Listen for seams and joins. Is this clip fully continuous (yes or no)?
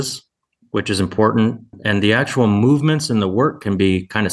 no